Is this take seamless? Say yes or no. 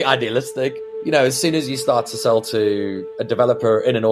no